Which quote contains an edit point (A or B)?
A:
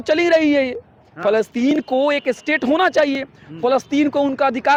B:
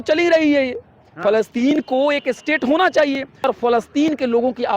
B